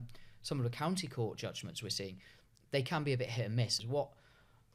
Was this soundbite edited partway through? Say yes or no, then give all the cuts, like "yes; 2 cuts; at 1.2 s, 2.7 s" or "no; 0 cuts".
yes; 1 cut; at 3.7 s